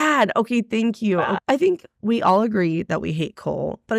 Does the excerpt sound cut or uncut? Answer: cut